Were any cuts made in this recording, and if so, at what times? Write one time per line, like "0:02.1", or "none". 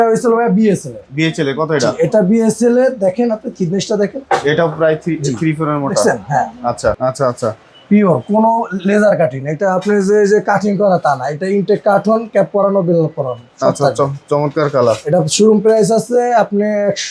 0:07.0